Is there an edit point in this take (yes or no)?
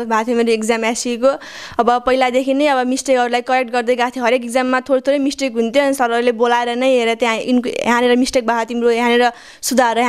no